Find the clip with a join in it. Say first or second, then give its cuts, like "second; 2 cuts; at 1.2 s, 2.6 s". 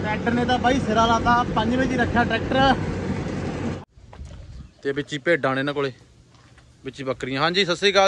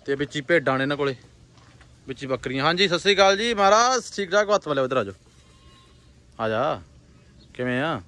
first; 1 cut; at 3.7 s